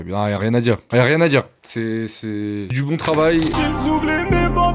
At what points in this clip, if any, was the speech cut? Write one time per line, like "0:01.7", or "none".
0:03.5